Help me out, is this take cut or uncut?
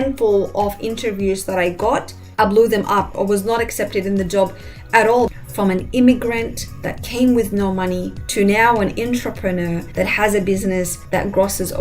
cut